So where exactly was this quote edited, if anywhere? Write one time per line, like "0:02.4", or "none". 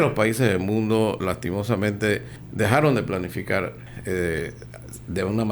0:02.4
0:03.9